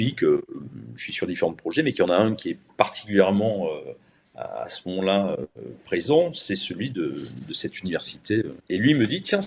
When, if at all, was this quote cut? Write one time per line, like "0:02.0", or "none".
0:08.6